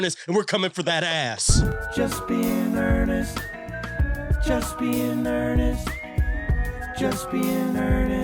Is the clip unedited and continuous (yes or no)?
no